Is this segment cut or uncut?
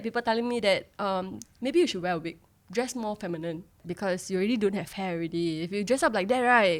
uncut